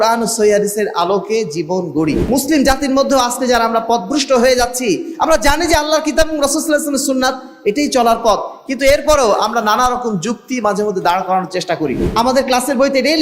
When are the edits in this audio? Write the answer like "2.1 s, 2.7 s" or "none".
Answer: 2.2 s, 12.0 s